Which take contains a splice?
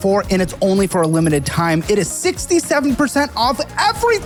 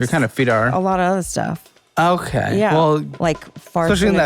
second; 1 cut; at 3.1 s

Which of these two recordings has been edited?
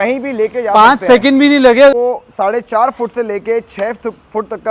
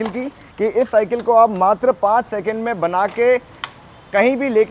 first; 1 cut; at 1.9 s

